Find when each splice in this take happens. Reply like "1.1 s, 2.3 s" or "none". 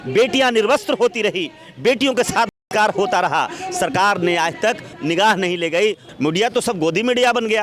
4.9 s, 6.1 s